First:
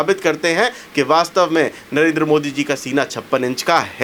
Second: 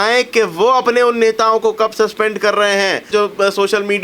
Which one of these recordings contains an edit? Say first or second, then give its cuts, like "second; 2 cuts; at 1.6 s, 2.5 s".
second; 1 cut; at 3.1 s